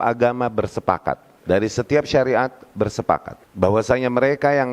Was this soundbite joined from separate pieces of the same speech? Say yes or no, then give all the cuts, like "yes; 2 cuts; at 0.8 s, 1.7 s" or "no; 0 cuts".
yes; 2 cuts; at 1.3 s, 3.4 s